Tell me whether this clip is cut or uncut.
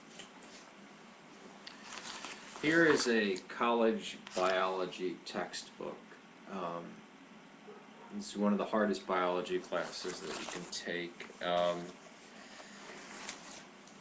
uncut